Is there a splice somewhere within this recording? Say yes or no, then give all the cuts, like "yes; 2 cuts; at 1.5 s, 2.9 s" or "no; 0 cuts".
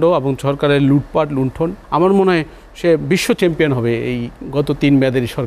yes; 1 cut; at 1.8 s